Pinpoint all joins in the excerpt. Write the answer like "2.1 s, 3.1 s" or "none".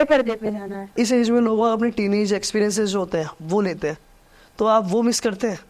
0.9 s